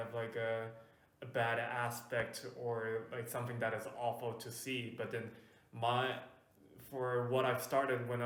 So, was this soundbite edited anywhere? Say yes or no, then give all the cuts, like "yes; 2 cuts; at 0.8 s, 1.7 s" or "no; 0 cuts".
no; 0 cuts